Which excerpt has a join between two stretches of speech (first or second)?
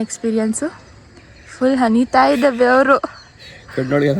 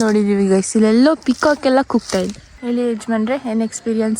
second